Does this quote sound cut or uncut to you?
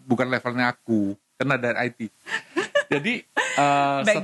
uncut